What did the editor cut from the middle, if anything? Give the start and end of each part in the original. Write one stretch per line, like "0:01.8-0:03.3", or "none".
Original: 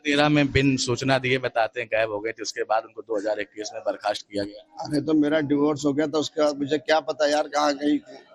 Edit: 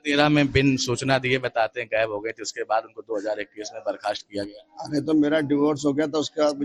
none